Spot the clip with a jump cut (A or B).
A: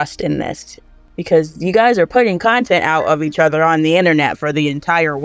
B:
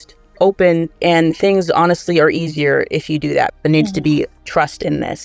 B